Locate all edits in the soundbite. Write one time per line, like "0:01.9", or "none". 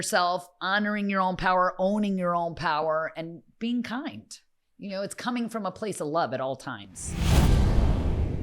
0:07.2